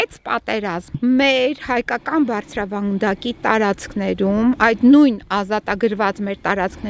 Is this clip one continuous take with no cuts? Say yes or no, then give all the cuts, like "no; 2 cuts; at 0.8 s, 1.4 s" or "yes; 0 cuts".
no; 1 cut; at 1.0 s